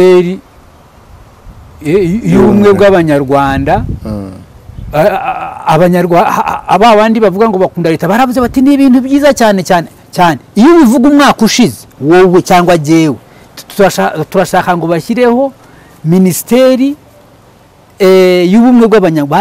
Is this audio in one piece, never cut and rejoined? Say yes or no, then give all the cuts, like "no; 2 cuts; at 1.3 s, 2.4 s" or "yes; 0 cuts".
yes; 0 cuts